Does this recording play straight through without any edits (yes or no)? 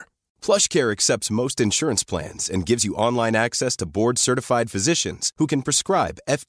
yes